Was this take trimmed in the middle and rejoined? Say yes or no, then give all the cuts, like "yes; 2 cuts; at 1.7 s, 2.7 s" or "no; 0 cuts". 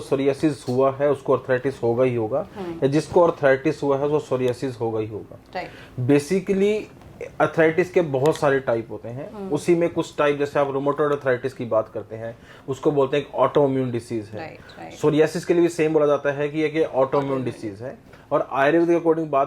no; 0 cuts